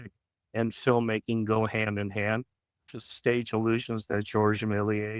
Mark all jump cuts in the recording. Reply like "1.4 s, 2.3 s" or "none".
2.8 s

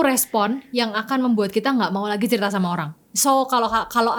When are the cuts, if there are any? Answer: none

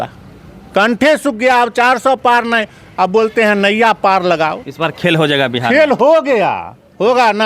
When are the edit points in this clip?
4.6 s

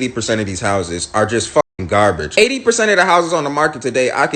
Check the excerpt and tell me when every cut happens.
2.3 s

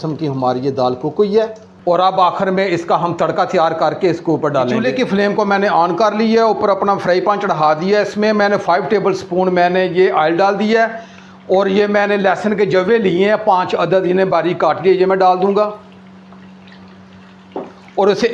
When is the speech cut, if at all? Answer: none

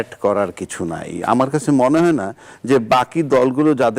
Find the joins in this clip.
none

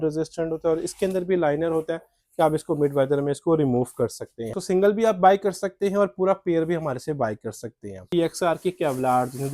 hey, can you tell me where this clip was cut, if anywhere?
4.6 s, 8.0 s

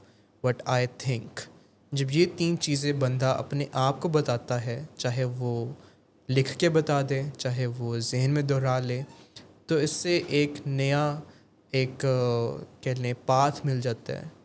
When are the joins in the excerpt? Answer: none

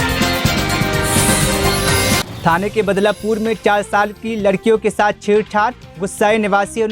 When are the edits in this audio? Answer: 2.3 s

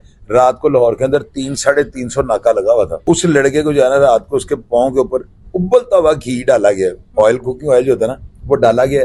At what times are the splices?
3.0 s

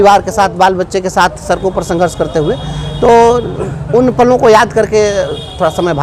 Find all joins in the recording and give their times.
none

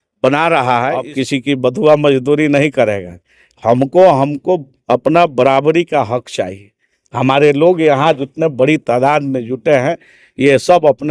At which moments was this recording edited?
1.1 s

